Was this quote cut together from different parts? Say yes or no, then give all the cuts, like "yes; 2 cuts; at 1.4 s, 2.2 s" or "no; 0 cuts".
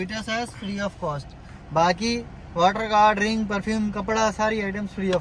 no; 0 cuts